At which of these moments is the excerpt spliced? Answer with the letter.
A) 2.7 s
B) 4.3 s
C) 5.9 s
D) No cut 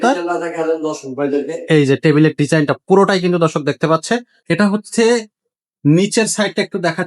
B